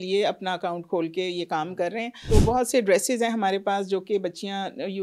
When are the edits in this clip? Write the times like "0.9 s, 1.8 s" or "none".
2.1 s